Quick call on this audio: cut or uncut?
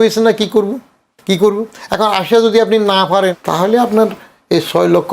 cut